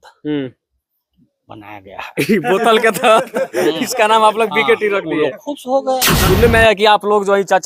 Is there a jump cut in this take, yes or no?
yes